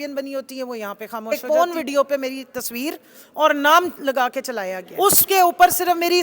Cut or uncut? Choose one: cut